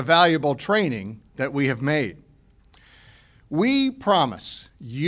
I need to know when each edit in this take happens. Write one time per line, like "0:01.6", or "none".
none